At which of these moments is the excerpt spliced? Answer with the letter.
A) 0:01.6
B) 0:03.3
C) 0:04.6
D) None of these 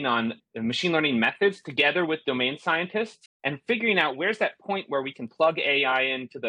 B